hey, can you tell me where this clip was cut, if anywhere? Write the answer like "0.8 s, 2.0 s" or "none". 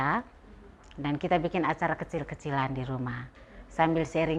none